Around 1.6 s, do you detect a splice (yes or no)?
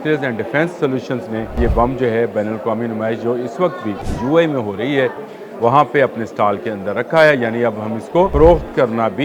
yes